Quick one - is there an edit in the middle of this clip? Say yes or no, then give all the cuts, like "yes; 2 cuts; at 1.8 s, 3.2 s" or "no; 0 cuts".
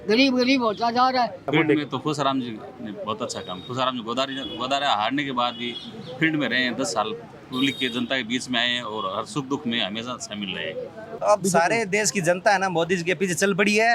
yes; 2 cuts; at 1.5 s, 11.2 s